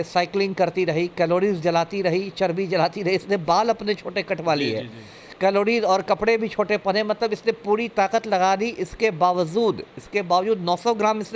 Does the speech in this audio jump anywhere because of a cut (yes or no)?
no